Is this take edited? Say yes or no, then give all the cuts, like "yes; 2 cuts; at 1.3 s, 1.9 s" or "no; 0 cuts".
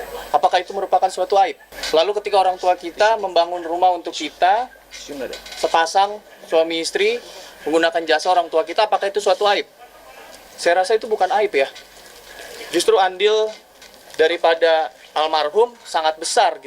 yes; 1 cut; at 1.7 s